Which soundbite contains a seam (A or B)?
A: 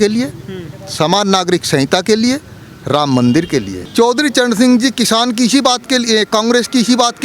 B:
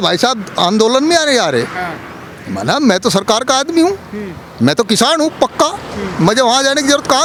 A